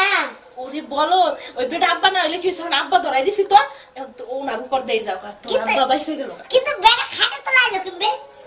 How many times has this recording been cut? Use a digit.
1